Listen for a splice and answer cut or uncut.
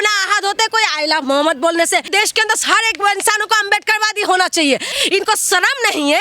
cut